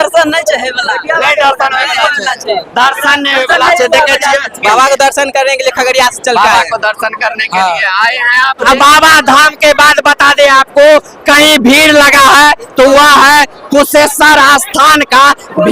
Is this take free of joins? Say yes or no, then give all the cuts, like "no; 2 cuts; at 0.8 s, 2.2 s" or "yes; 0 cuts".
no; 2 cuts; at 4.5 s, 8.7 s